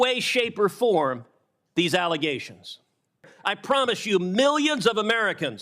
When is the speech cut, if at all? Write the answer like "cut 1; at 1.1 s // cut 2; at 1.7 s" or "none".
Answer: cut 1; at 3.3 s